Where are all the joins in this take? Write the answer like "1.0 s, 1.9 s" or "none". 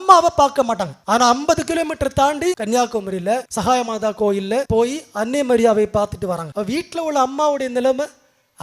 0.9 s, 2.6 s, 3.5 s, 4.7 s, 6.5 s